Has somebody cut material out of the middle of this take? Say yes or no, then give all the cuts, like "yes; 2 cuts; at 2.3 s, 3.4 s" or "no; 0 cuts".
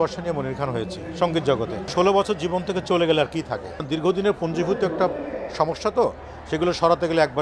yes; 2 cuts; at 1.9 s, 3.9 s